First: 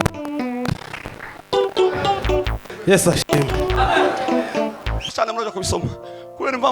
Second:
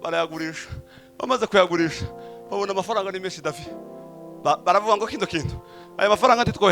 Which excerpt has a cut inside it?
first; 1 cut; at 5.0 s

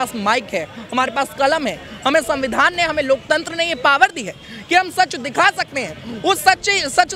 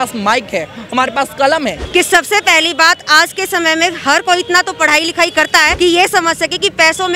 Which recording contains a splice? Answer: second; 2 cuts; at 1.8 s, 5.7 s

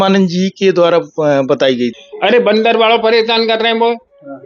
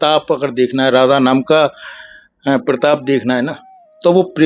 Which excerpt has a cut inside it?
first; 1 cut; at 2.0 s

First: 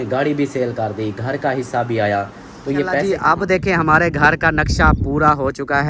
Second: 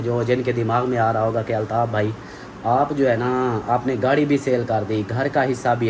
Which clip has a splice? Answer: first; 1 cut; at 3.1 s

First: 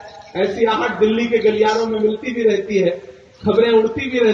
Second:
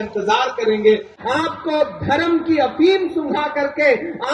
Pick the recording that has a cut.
second; 1 cut; at 1.1 s

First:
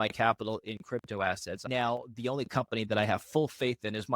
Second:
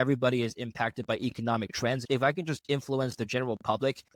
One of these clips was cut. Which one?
first; 1 cut; at 1.6 s

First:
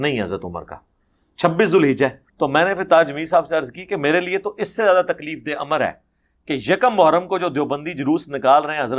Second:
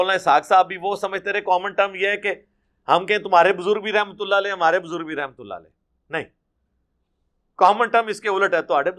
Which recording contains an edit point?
first; 1 cut; at 2.2 s

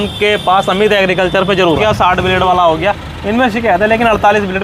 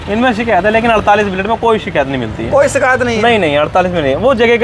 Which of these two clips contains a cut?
first; 1 cut; at 1.8 s

